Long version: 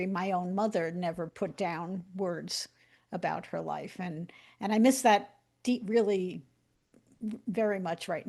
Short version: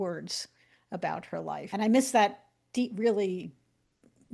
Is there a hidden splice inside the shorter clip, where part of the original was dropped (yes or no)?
yes